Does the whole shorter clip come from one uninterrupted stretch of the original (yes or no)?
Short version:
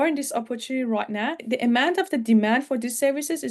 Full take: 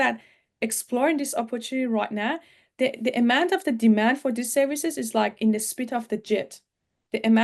no